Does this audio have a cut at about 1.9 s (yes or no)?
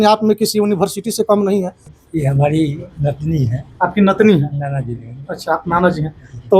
yes